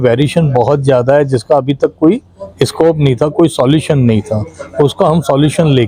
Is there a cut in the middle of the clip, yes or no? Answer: no